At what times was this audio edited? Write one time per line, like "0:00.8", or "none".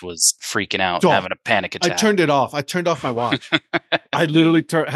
none